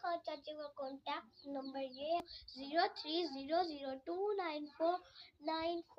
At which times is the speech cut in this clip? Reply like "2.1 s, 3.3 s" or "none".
2.2 s